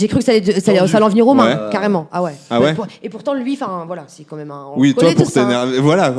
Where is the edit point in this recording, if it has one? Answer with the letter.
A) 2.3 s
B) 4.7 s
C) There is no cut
C